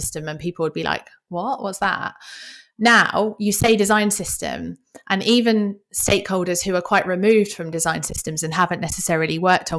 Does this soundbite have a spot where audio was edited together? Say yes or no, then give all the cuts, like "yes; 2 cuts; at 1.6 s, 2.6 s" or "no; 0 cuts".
no; 0 cuts